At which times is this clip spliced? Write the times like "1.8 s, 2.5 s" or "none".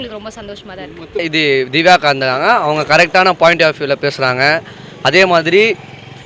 1.3 s